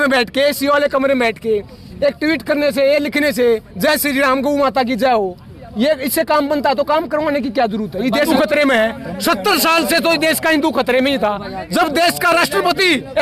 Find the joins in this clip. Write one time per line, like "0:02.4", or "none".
0:08.3